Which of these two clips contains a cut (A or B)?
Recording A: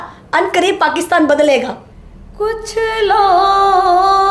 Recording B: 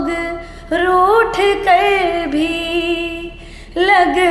A